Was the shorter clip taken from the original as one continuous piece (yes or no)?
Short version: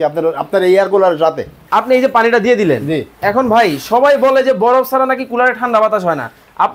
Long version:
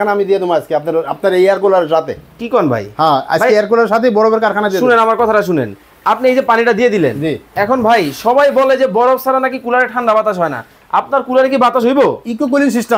no